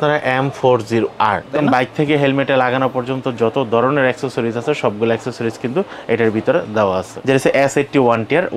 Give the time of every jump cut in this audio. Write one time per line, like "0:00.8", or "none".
0:01.5
0:07.1